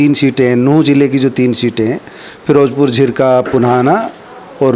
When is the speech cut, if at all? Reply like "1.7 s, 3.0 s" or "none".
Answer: none